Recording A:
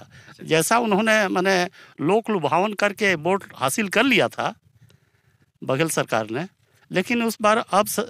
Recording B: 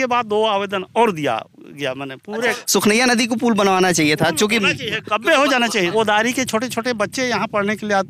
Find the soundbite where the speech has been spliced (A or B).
B